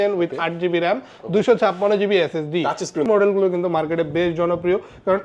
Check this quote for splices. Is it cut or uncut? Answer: cut